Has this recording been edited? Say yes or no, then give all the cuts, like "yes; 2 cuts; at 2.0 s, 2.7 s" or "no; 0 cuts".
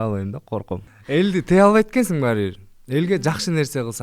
yes; 1 cut; at 0.9 s